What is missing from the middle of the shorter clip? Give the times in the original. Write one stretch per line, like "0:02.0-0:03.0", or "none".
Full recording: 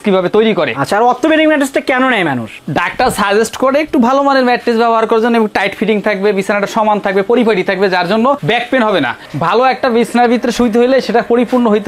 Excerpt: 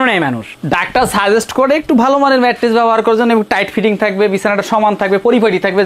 none